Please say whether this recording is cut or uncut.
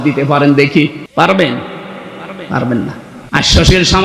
cut